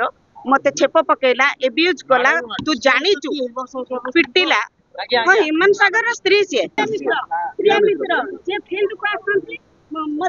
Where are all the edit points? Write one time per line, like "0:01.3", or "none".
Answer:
0:06.7